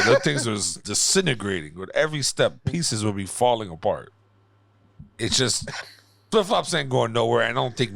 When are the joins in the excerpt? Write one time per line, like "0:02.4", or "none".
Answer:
none